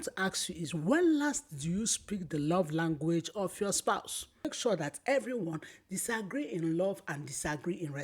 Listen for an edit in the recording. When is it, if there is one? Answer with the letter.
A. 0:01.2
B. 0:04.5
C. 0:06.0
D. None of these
B